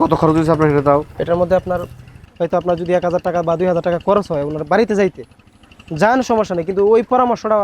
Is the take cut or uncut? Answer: cut